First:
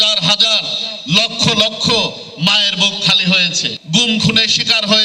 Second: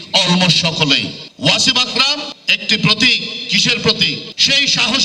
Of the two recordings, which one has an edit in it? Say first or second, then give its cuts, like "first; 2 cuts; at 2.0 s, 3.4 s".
second; 1 cut; at 1.2 s